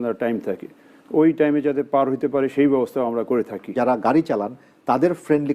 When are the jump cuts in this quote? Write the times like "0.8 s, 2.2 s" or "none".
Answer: 3.7 s